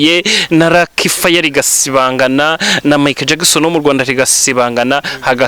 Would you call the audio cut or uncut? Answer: uncut